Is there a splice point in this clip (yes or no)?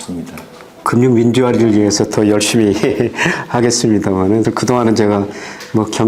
yes